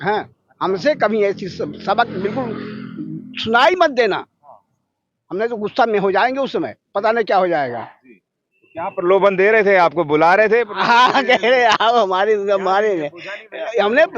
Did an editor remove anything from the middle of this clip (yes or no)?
no